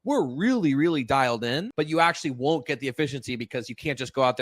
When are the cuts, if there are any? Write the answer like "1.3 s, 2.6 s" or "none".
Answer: 1.7 s